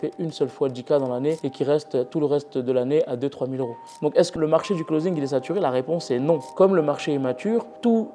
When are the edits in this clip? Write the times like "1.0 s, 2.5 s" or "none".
4.1 s, 6.5 s